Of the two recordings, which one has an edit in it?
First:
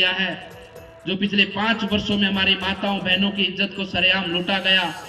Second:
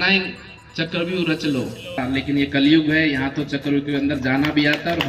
second; 1 cut; at 2.0 s

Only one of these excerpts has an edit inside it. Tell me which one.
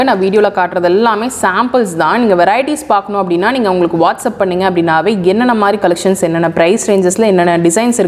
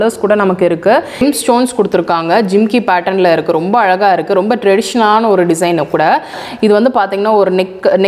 second; 2 cuts; at 1.2 s, 6.4 s

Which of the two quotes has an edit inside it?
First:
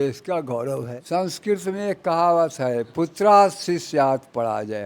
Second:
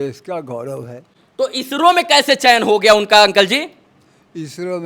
first; 1 cut; at 1.0 s

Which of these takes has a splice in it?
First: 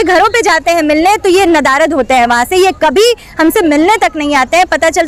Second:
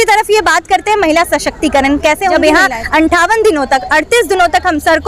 second; 1 cut; at 2.4 s

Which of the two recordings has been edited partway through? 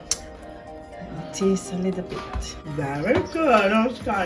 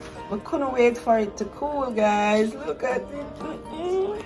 first; 1 cut; at 2.6 s

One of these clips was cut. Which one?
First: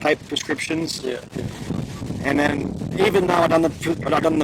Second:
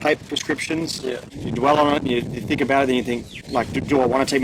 second; 1 cut; at 1.4 s

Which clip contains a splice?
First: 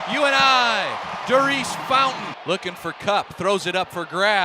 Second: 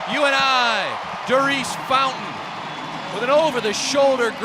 first; 1 cut; at 2.3 s

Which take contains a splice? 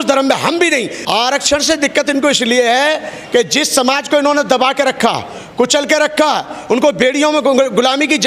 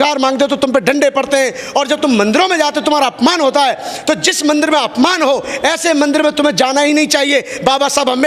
first; 1 cut; at 1.0 s

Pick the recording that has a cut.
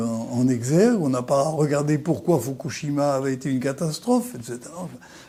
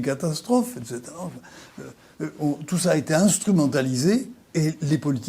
second; 1 cut; at 4.4 s

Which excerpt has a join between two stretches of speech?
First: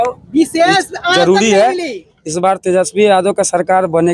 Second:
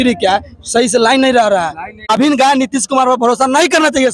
second; 1 cut; at 2.2 s

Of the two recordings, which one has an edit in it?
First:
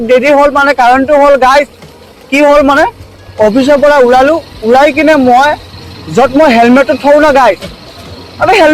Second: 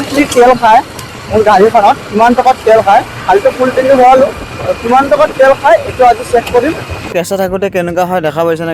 second; 1 cut; at 7.1 s

